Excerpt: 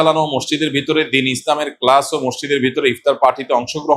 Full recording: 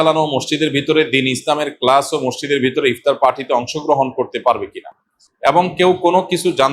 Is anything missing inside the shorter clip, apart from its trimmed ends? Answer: no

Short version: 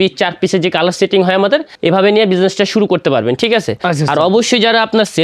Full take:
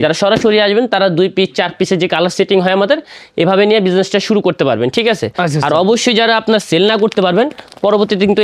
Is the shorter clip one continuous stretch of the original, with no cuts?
no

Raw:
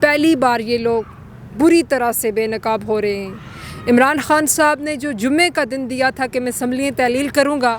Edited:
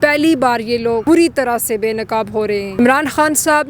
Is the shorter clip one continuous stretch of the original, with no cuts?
no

